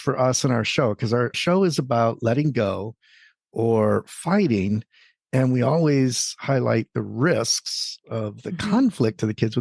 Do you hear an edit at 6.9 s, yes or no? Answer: no